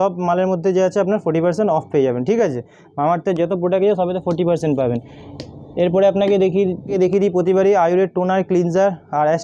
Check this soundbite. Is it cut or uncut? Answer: uncut